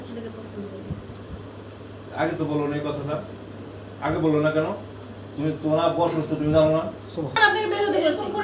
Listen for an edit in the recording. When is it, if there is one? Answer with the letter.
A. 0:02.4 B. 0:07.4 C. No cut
B